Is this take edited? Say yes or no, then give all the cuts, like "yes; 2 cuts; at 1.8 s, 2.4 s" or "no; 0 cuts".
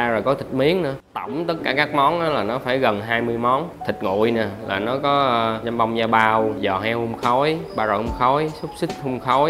yes; 5 cuts; at 1.0 s, 3.7 s, 5.6 s, 6.6 s, 7.7 s